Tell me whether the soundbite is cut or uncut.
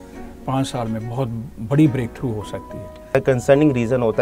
cut